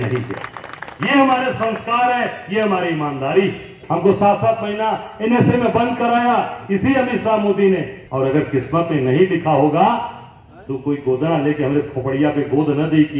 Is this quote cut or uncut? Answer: cut